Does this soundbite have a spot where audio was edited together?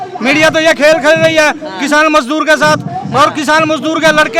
no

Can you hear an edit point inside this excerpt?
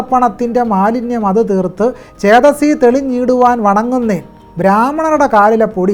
no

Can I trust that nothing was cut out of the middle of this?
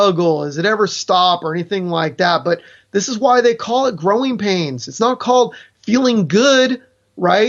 yes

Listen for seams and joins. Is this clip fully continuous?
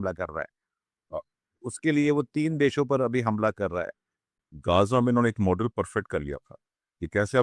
no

